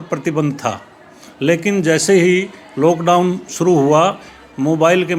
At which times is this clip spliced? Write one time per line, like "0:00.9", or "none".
none